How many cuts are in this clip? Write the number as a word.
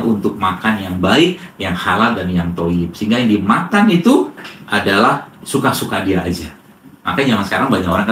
zero